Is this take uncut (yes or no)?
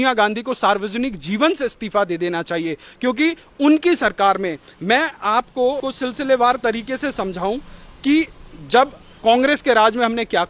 no